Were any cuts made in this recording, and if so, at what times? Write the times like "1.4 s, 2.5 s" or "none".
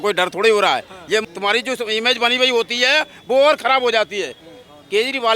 1.2 s

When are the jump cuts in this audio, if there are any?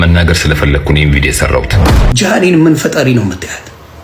1.8 s

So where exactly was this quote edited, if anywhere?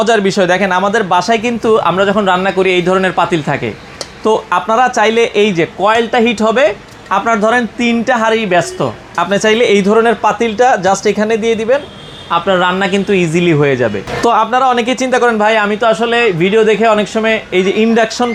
none

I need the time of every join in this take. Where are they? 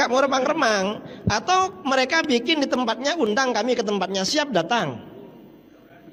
none

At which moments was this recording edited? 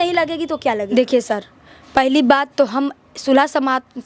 none

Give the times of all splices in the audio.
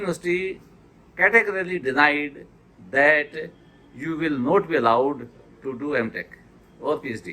none

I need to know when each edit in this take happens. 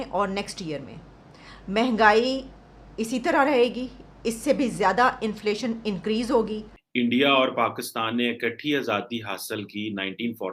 6.7 s

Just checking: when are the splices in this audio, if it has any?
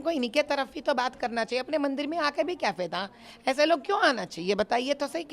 none

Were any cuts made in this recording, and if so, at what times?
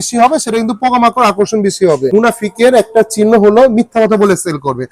2.1 s

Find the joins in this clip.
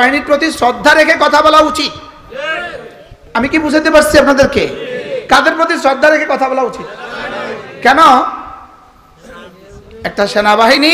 none

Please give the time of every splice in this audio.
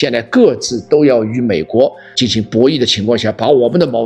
2.0 s

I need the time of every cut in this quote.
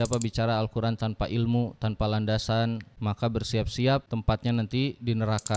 2.9 s, 4.1 s

